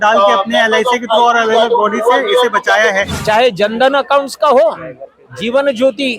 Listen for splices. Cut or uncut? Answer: cut